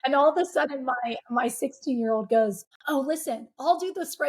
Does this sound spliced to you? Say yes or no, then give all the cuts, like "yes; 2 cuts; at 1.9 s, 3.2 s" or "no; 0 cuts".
yes; 1 cut; at 2.7 s